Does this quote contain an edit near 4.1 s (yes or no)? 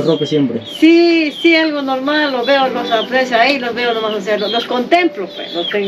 no